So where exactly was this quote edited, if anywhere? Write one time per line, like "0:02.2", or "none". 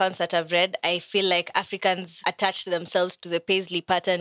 0:02.1